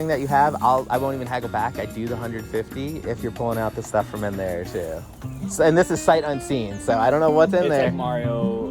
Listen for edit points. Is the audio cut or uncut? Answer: uncut